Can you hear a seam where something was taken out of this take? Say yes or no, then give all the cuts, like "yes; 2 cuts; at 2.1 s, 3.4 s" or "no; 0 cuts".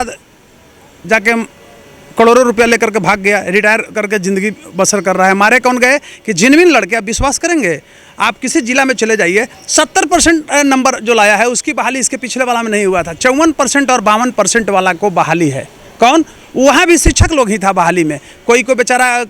no; 0 cuts